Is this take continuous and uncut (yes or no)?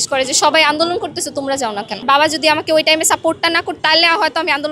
no